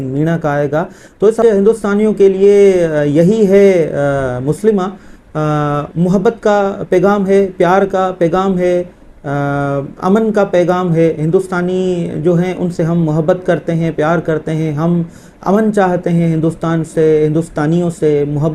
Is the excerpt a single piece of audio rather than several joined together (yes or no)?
no